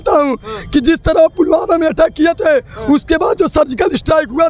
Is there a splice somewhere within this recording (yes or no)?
no